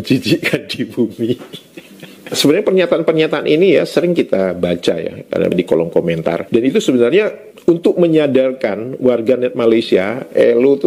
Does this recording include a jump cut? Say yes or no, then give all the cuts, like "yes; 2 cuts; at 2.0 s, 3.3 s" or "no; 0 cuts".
no; 0 cuts